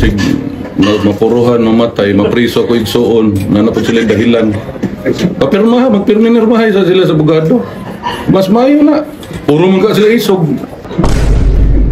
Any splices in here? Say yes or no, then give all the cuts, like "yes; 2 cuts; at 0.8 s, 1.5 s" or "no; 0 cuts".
yes; 1 cut; at 10.8 s